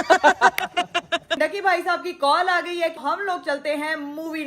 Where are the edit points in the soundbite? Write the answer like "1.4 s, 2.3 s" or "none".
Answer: 1.3 s, 3.0 s